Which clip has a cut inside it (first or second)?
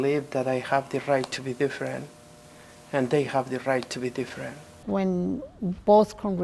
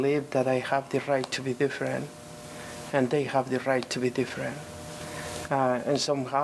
first